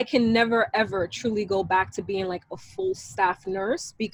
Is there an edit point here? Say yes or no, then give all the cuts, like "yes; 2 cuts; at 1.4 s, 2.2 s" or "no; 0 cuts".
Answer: no; 0 cuts